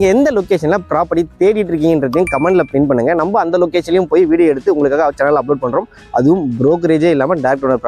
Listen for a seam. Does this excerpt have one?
no; 0 cuts

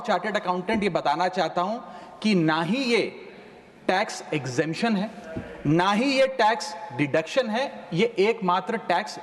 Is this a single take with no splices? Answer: yes; 0 cuts

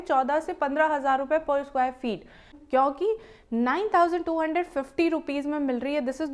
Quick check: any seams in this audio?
yes; 1 cut; at 2.5 s

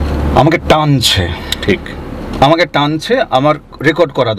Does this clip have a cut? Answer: no; 0 cuts

